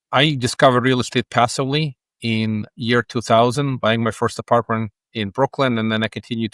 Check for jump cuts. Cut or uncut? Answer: uncut